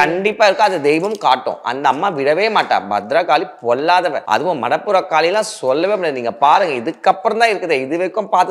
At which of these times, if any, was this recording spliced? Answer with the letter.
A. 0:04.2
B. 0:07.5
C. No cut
A